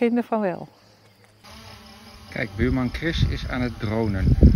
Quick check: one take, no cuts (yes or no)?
yes